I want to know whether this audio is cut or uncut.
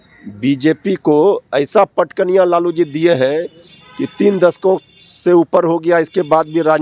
uncut